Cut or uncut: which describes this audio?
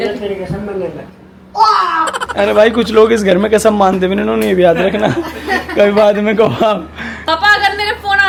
uncut